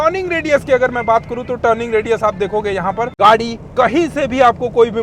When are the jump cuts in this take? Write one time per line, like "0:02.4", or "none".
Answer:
0:03.1

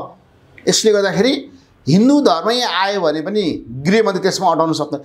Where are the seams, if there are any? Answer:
none

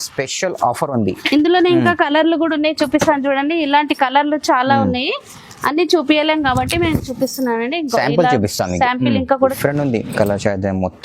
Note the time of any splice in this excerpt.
0:09.4

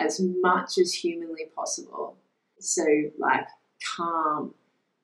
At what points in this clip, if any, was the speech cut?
0:02.6

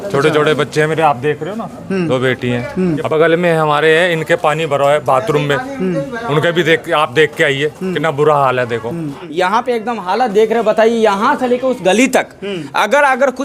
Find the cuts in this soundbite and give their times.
0:03.1
0:09.2

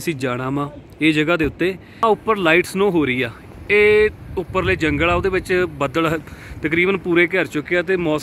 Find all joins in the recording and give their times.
0:02.0

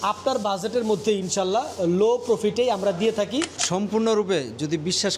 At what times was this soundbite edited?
0:03.6

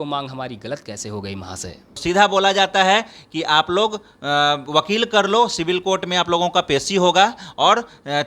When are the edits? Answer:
0:01.9

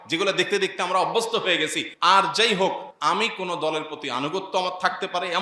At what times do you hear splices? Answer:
0:01.8
0:02.9

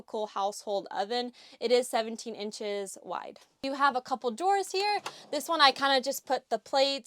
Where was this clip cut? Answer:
none

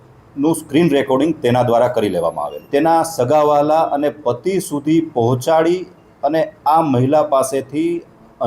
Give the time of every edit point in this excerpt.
0:02.6

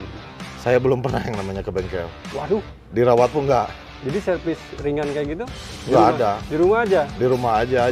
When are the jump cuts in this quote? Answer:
none

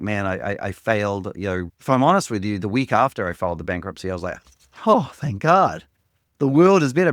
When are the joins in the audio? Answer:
0:01.7

